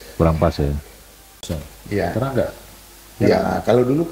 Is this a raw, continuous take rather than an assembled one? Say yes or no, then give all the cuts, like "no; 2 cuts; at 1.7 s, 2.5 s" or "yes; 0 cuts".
no; 1 cut; at 1.5 s